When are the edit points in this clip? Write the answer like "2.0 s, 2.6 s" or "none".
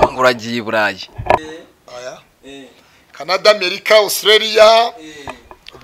1.4 s